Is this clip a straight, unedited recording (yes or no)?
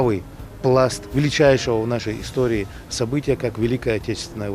no